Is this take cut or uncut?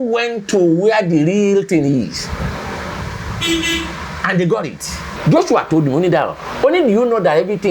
cut